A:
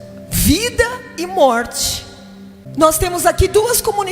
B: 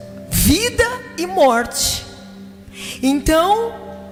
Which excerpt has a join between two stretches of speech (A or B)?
A